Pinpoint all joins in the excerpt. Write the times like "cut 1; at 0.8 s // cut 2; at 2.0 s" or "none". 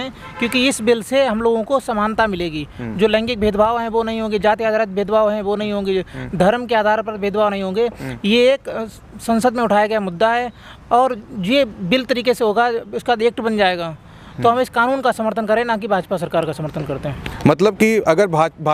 none